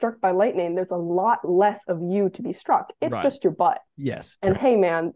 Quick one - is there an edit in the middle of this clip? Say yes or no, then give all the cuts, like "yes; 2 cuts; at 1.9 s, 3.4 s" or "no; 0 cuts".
no; 0 cuts